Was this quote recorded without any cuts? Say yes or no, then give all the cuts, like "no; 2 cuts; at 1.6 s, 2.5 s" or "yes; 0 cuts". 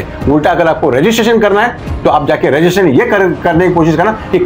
yes; 0 cuts